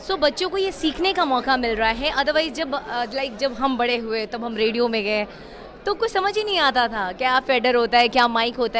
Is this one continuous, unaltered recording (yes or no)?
yes